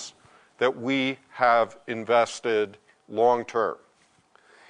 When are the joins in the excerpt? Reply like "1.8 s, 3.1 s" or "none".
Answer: none